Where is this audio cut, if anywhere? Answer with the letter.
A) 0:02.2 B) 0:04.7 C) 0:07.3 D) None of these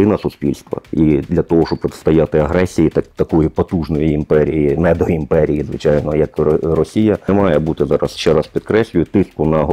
C